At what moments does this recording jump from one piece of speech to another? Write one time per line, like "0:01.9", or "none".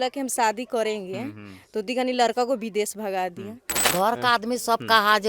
0:03.7